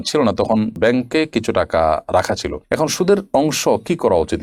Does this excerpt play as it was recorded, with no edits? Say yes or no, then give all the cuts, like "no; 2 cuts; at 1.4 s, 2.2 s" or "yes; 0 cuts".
yes; 0 cuts